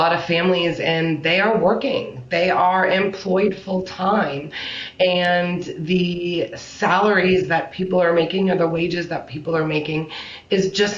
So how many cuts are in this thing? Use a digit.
0